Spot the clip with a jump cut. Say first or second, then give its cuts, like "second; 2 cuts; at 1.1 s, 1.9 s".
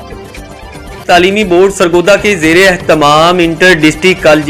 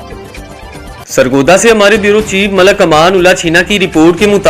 first; 1 cut; at 1.0 s